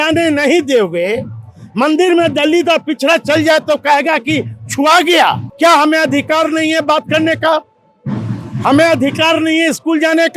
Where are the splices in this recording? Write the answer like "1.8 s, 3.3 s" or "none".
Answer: 5.4 s